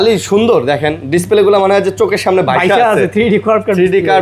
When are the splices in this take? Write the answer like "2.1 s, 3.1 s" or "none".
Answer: none